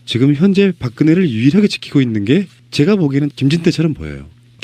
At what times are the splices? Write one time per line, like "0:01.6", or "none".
none